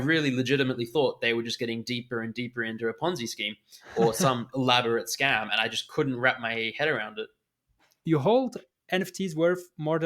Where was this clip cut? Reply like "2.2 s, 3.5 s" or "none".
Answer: 8.1 s